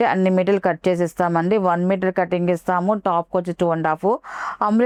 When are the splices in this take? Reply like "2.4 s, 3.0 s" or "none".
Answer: none